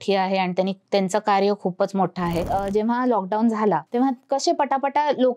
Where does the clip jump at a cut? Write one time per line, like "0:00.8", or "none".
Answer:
0:02.5
0:03.9